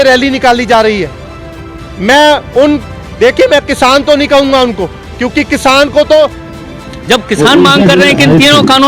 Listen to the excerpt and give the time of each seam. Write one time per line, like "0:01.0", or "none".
0:06.5